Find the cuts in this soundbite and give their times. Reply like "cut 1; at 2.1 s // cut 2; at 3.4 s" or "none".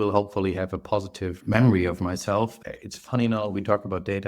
cut 1; at 1.4 s // cut 2; at 2.6 s